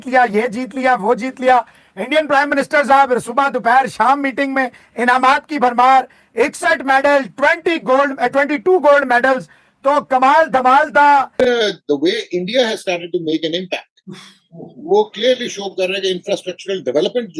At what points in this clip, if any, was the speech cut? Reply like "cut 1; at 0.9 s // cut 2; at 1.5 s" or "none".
cut 1; at 11.4 s